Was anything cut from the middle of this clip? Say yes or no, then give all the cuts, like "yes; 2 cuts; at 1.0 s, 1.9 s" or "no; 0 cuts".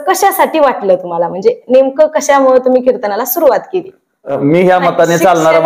yes; 1 cut; at 4.3 s